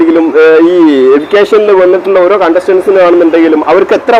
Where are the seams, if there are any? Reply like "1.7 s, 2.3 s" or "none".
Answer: none